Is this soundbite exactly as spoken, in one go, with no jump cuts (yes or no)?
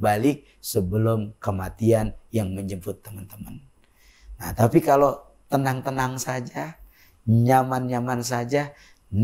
yes